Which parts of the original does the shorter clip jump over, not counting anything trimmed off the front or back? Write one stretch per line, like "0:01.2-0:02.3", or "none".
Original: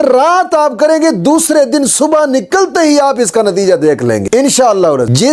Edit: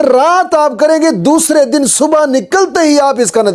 none